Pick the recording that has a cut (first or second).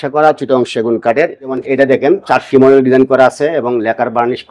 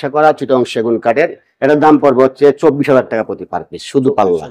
first